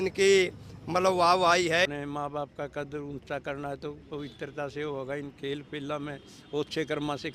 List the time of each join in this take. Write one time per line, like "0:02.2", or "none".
0:01.9